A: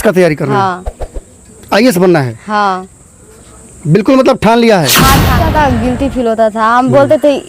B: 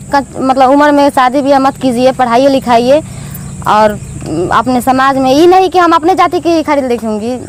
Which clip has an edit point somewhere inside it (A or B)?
A